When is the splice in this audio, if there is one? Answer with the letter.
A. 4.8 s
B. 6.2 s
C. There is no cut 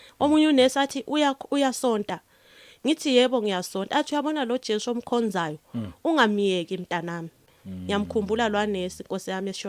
C